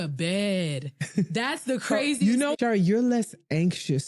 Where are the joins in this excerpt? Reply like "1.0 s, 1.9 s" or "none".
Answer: 2.5 s